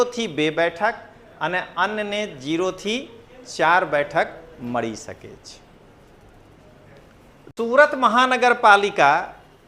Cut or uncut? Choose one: cut